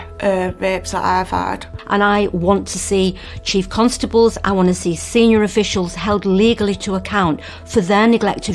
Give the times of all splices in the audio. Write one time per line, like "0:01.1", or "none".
0:01.8